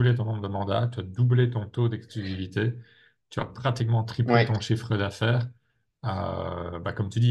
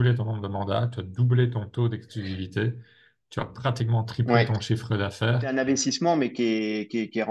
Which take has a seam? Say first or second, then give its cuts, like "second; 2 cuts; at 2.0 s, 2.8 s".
second; 1 cut; at 5.5 s